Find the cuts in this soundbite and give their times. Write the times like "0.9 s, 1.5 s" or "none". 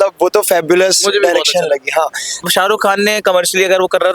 2.4 s